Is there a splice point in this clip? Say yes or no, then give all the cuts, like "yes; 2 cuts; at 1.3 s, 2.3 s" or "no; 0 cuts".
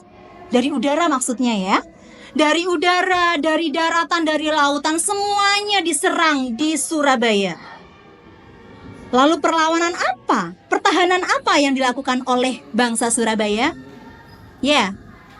no; 0 cuts